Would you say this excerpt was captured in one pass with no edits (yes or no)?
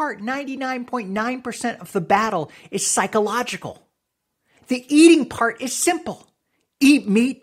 yes